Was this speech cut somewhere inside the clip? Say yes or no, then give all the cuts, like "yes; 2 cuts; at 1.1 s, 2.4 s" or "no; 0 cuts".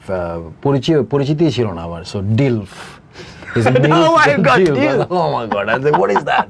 no; 0 cuts